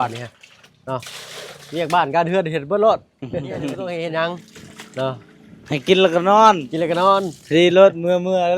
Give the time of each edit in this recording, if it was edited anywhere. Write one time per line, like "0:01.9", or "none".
0:03.8